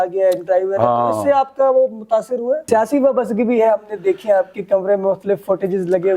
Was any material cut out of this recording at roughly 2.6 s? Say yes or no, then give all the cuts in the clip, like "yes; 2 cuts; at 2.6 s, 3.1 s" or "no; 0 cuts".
yes; 1 cut; at 2.6 s